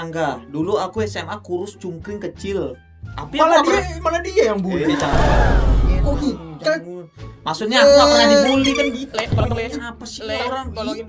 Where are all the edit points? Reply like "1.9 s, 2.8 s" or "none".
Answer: none

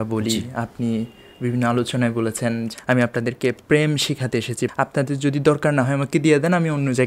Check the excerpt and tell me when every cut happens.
2.7 s, 4.7 s

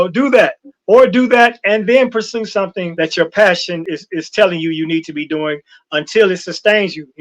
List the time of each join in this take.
2.8 s, 3.9 s

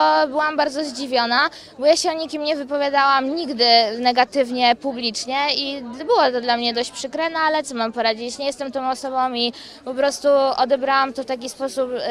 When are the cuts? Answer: none

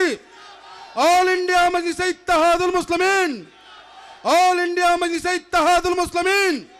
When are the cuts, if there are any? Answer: none

